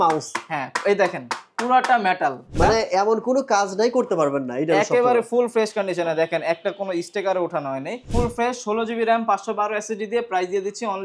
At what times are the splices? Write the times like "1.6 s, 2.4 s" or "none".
2.5 s, 8.1 s

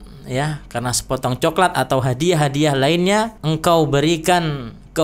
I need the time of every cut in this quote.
3.4 s

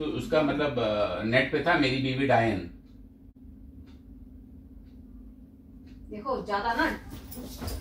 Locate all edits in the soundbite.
3.3 s

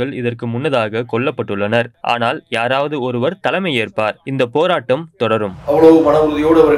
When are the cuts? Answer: 1.9 s, 4.2 s, 5.5 s

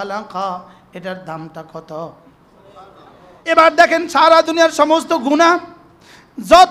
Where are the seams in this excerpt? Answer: 3.4 s

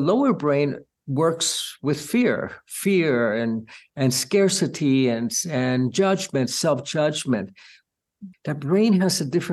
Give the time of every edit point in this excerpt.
8.0 s

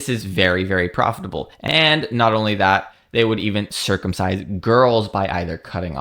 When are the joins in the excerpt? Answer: 1.6 s

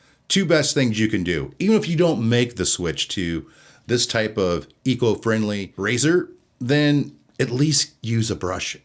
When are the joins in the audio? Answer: 5.7 s

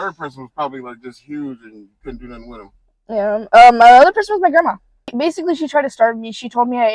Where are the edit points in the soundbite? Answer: 5.1 s

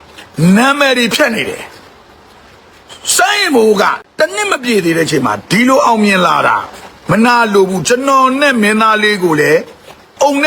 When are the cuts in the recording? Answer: 4.0 s

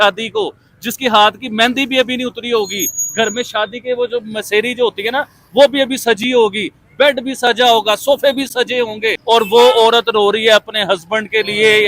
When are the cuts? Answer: 9.2 s

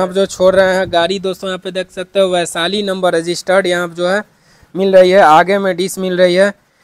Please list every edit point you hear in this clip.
none

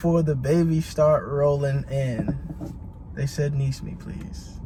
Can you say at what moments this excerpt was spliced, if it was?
none

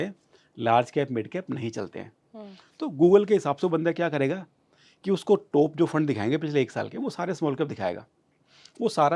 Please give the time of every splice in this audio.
none

